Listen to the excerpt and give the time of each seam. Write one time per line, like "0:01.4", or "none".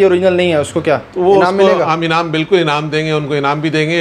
none